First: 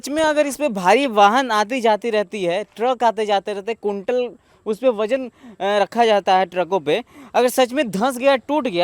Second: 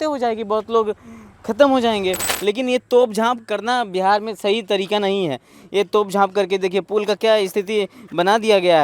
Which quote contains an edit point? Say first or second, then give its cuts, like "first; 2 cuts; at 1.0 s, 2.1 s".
second; 1 cut; at 2.3 s